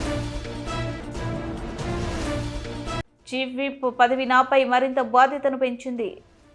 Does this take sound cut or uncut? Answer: uncut